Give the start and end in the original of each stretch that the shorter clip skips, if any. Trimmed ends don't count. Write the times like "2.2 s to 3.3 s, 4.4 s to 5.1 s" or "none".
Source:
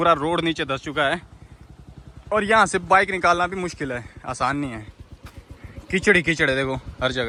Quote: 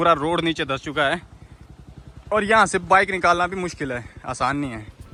none